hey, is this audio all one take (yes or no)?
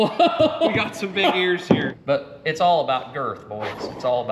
no